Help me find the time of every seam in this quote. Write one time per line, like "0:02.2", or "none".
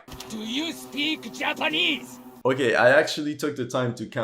0:02.2